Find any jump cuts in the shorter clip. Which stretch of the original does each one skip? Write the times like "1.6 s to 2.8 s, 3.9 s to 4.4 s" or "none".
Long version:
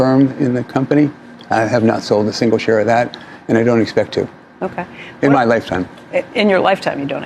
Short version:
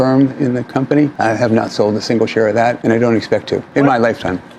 1.1 s to 1.5 s, 3.1 s to 3.4 s, 4.3 s to 5.1 s